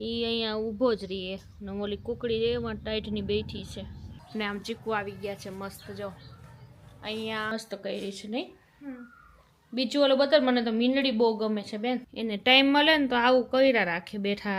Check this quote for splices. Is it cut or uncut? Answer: cut